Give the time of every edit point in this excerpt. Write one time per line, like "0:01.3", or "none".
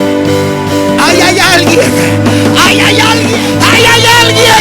0:03.3